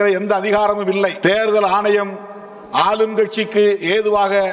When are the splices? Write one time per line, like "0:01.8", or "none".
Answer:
0:01.2